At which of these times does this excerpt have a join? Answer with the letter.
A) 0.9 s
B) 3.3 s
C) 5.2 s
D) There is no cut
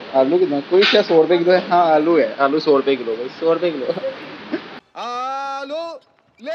C